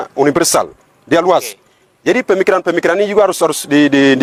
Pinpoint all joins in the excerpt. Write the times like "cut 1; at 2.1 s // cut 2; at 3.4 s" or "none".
none